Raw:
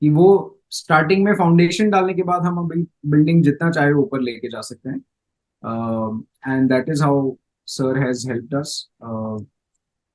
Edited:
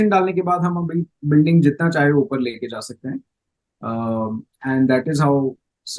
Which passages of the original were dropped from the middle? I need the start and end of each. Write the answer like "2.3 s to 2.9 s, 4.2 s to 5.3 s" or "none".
none